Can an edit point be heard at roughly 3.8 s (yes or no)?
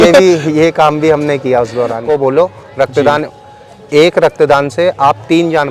no